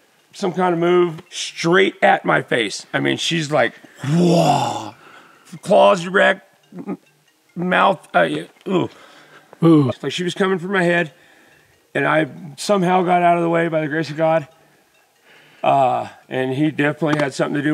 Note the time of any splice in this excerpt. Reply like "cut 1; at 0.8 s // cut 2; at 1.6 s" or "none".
cut 1; at 1.2 s // cut 2; at 9.9 s

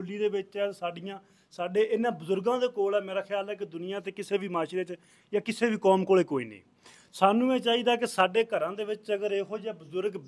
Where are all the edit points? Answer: none

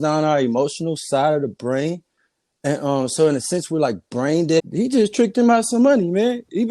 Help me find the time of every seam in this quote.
cut 1; at 4.6 s

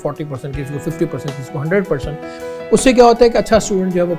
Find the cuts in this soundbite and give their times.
none

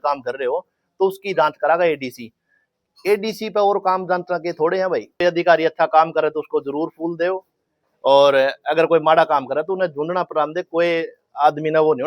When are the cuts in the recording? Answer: cut 1; at 5.2 s

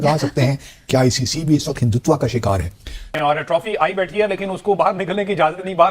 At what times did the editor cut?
cut 1; at 3.1 s

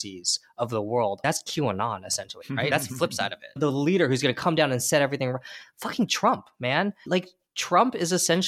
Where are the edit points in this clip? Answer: cut 1; at 3.6 s // cut 2; at 7.0 s

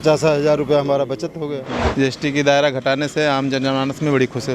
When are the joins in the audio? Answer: cut 1; at 1.8 s

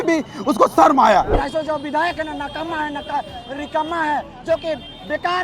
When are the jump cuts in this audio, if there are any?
cut 1; at 1.4 s

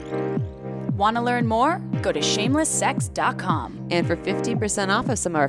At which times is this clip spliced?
cut 1; at 1.0 s

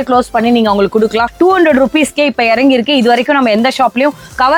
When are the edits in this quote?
cut 1; at 1.3 s

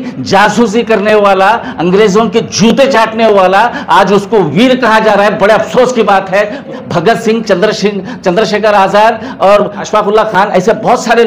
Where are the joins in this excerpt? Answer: cut 1; at 6.8 s // cut 2; at 9.8 s

